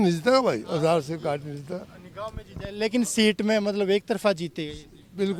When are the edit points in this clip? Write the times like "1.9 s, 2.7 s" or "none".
none